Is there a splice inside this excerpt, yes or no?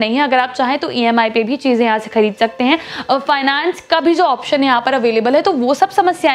no